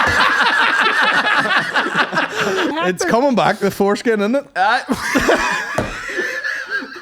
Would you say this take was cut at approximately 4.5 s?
no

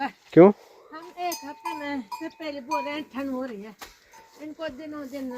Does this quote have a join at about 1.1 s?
no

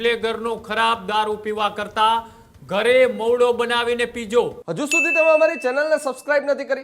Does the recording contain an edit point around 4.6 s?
yes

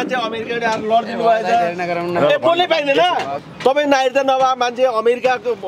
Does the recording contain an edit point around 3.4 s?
yes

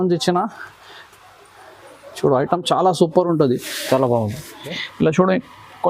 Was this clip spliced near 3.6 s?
no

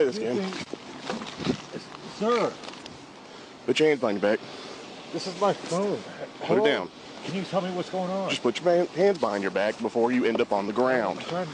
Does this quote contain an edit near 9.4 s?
no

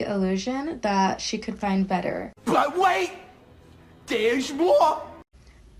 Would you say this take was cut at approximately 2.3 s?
no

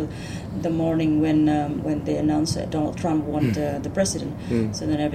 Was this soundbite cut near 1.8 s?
no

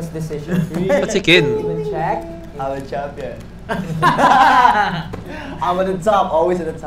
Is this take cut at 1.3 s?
yes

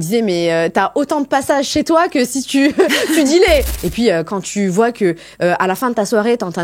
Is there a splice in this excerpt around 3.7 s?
yes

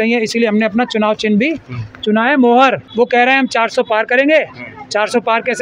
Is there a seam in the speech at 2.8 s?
yes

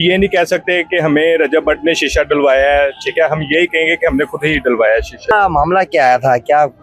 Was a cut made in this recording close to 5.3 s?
yes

